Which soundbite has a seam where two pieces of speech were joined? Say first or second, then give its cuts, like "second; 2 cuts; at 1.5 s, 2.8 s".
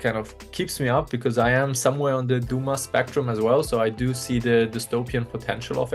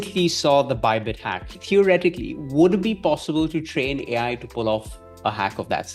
second; 1 cut; at 1.5 s